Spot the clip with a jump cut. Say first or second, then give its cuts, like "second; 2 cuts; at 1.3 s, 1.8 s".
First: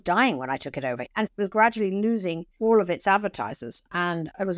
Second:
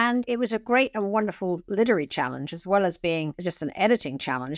first; 2 cuts; at 1.0 s, 2.4 s